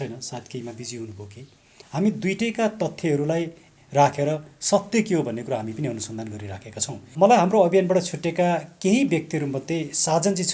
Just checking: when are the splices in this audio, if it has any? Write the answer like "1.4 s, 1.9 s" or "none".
1.8 s, 7.1 s